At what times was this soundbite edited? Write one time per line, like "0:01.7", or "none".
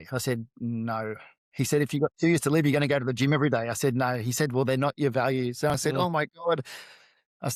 none